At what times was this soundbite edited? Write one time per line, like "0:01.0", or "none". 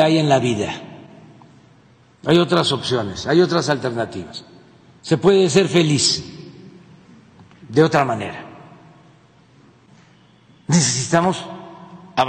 0:09.9